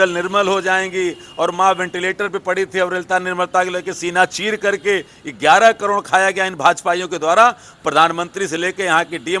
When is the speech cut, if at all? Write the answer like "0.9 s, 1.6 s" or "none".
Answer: none